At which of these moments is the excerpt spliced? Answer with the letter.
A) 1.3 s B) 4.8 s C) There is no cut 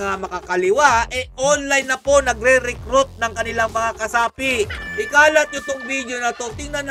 B